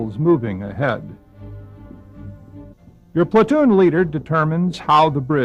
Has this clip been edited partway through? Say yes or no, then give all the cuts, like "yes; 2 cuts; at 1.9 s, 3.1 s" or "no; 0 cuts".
no; 0 cuts